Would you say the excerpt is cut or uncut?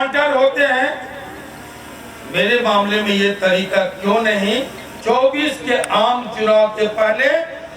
cut